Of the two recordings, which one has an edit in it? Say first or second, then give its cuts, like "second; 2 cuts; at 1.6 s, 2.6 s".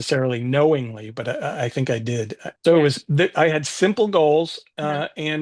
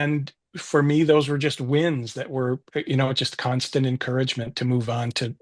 first; 1 cut; at 2.4 s